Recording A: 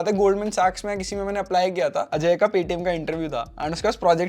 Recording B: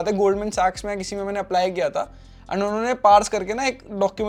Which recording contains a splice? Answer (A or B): A